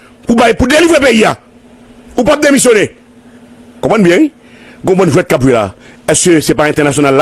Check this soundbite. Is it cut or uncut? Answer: uncut